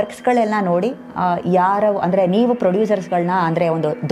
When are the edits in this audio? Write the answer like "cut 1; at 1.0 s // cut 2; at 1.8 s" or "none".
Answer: none